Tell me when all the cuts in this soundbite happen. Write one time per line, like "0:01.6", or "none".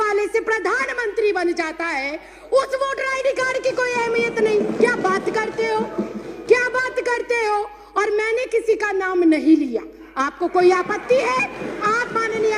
none